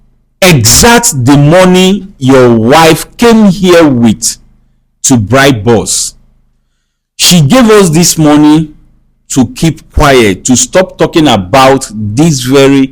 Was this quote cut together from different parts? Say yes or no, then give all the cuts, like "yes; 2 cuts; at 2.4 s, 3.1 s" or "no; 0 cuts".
no; 0 cuts